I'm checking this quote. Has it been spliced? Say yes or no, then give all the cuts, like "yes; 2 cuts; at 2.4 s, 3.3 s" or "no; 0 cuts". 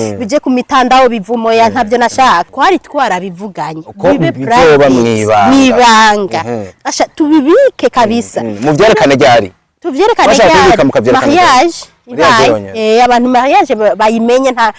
yes; 1 cut; at 2.5 s